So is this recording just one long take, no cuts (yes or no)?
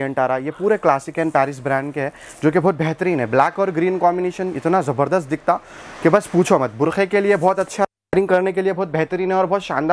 yes